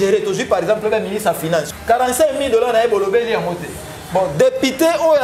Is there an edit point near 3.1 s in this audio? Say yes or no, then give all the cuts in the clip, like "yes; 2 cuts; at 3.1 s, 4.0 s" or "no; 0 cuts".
no; 1 cut; at 1.7 s